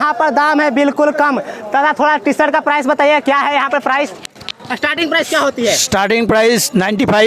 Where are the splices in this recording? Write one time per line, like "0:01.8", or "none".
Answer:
none